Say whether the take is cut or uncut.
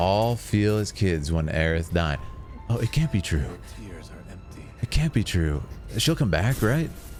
uncut